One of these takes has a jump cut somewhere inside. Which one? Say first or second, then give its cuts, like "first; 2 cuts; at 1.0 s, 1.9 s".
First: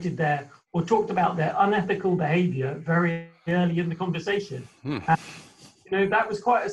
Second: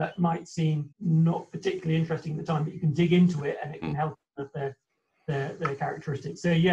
second; 1 cut; at 0.9 s